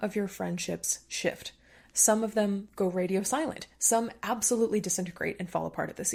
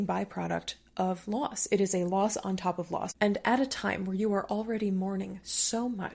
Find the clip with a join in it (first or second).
second